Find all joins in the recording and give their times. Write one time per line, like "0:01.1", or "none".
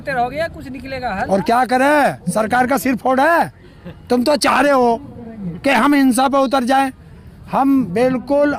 none